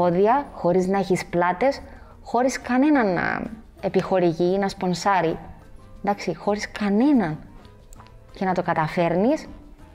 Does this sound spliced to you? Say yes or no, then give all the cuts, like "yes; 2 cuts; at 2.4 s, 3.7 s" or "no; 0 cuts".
no; 0 cuts